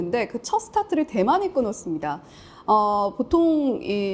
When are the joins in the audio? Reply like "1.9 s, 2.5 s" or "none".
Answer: none